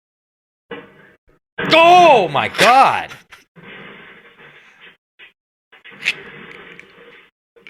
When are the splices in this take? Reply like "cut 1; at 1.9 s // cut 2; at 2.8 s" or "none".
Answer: none